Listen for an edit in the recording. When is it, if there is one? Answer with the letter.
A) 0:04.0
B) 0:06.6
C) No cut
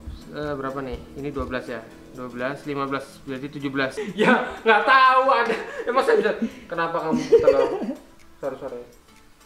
A